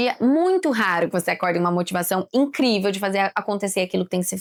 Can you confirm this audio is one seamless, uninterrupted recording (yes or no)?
yes